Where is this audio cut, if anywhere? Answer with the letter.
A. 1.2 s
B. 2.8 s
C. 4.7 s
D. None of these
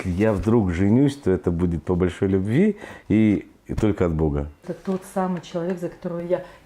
C